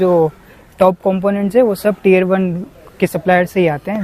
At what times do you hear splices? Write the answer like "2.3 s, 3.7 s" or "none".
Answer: none